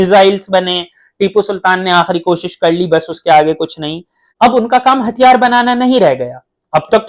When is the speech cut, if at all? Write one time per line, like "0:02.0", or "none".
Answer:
0:04.2